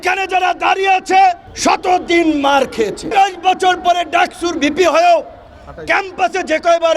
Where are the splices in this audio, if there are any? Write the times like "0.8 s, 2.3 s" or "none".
1.5 s, 3.1 s